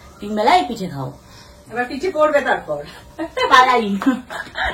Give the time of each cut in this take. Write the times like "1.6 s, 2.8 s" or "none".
3.1 s